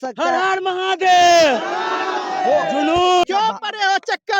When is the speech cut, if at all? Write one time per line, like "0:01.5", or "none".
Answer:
0:03.2